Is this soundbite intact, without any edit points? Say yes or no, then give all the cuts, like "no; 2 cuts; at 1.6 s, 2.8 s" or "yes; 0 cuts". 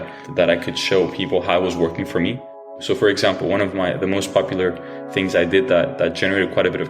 no; 1 cut; at 2.7 s